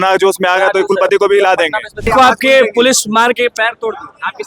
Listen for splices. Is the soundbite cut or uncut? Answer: cut